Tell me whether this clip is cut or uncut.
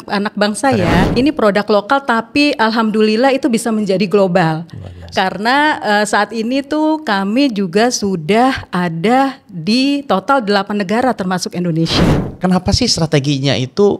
cut